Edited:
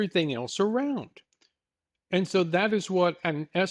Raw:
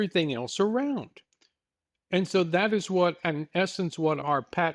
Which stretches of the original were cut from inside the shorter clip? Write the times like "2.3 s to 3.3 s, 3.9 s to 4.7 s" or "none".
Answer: none